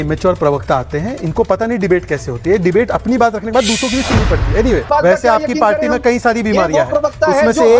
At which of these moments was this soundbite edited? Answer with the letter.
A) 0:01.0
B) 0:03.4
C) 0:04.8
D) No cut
C